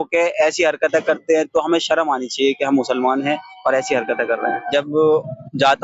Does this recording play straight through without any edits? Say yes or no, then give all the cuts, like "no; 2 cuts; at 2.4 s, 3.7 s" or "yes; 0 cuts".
no; 1 cut; at 4.6 s